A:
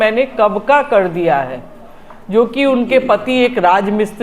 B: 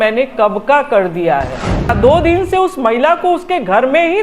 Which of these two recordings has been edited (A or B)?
B